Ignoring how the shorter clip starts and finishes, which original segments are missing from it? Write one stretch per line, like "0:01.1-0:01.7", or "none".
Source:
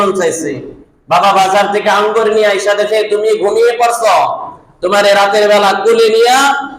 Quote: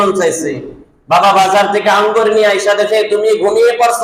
none